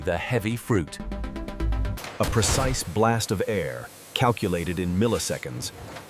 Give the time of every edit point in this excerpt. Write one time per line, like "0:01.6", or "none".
0:01.9